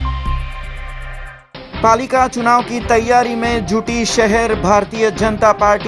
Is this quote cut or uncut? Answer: cut